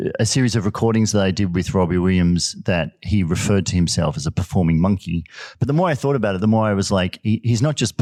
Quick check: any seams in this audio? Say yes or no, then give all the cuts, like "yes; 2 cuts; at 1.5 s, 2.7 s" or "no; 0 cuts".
no; 0 cuts